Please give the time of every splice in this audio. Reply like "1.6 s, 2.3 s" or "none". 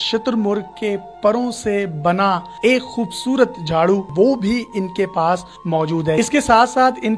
4.1 s, 6.2 s